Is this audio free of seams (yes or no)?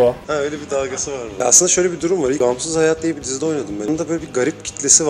no